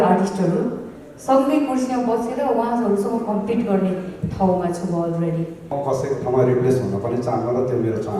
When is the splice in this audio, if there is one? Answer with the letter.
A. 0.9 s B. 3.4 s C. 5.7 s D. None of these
C